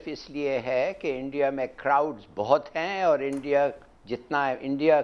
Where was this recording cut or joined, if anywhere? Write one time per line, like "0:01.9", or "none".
none